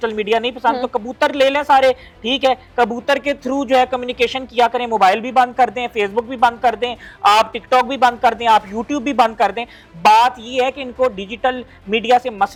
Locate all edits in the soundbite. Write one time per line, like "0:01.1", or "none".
none

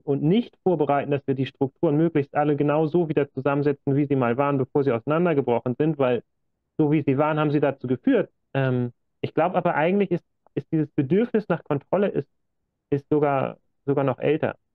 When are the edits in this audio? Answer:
0:08.4

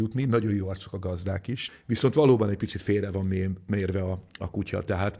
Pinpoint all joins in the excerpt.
none

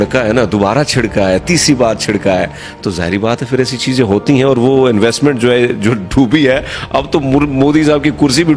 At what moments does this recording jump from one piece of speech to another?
none

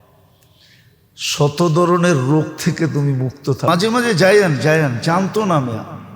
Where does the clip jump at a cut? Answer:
0:03.7

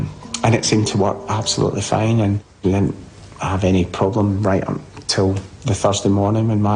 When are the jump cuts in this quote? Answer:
none

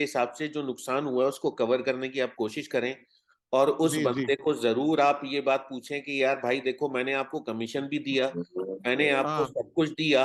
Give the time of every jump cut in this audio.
none

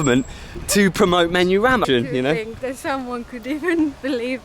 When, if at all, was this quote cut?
0:01.8

